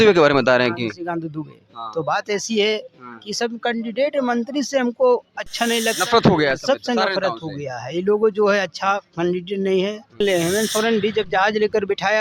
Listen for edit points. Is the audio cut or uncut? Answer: cut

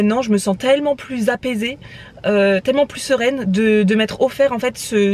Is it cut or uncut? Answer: uncut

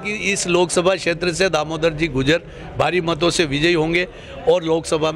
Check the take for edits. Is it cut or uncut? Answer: uncut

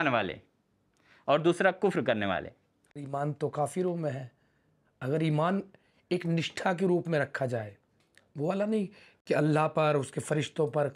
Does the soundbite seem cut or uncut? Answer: cut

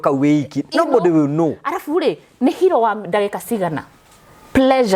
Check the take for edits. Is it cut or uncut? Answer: uncut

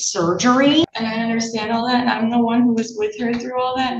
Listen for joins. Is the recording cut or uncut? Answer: cut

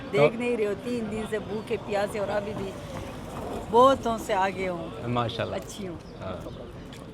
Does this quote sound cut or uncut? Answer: uncut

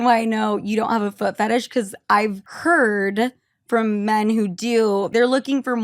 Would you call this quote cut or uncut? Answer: cut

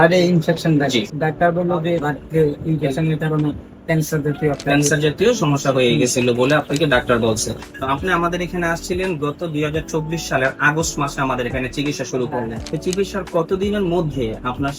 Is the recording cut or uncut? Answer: cut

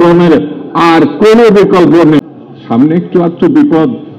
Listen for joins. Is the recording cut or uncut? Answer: cut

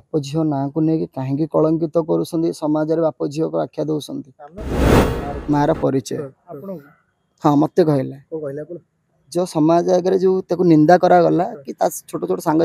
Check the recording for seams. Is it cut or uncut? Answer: cut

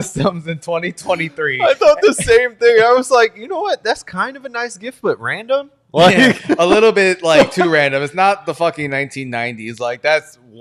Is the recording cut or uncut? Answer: uncut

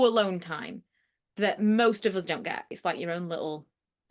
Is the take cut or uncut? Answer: cut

